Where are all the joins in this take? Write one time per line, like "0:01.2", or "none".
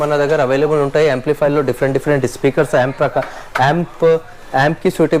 none